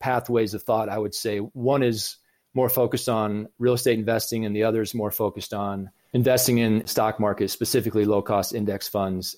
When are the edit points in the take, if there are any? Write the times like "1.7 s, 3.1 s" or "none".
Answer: none

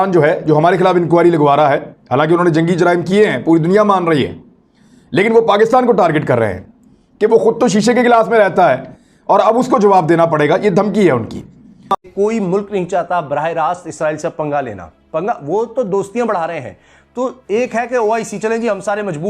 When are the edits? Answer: 11.8 s

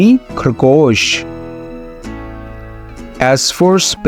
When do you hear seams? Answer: 1.4 s, 3.2 s

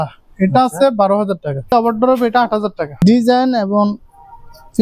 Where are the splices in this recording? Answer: 1.7 s, 3.0 s

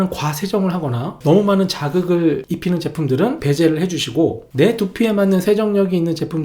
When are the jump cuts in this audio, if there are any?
1.1 s, 2.5 s, 3.4 s

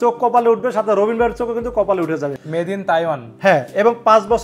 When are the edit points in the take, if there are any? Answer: 2.4 s

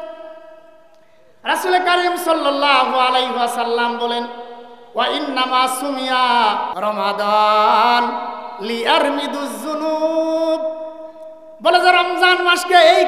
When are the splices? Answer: 6.7 s

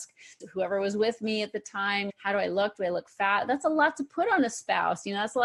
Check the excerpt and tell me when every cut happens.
none

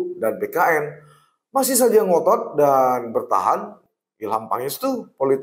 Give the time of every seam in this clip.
3.8 s

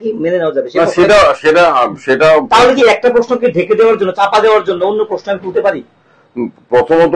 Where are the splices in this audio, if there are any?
none

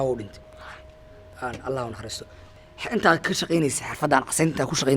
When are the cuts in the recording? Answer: 2.4 s

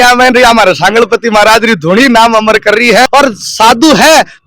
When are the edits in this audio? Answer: 3.1 s

